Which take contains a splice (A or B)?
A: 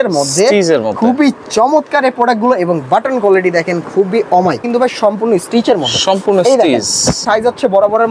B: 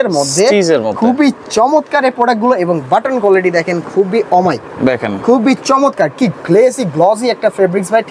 A